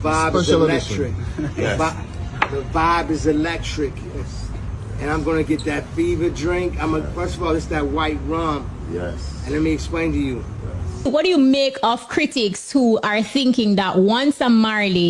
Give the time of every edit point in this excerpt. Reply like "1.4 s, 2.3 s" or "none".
11.1 s